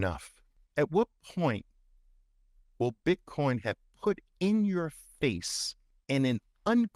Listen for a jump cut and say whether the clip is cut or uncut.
cut